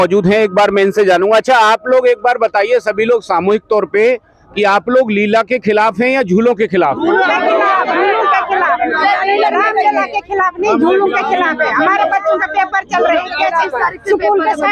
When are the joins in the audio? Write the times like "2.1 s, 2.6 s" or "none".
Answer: none